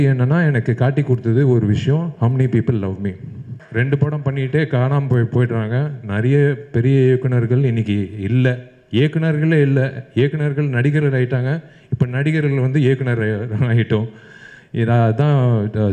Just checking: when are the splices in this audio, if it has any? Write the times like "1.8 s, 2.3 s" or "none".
3.6 s